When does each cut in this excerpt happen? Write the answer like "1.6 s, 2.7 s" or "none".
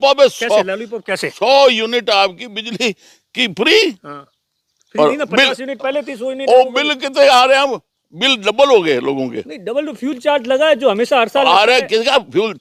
none